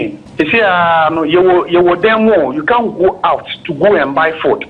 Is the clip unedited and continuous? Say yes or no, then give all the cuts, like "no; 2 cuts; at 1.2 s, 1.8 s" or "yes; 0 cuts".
yes; 0 cuts